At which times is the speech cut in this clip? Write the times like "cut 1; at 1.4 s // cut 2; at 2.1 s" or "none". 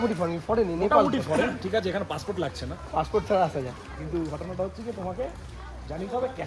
none